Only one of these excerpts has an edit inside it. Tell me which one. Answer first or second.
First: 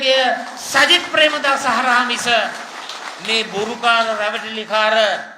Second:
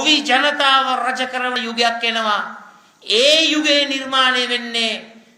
second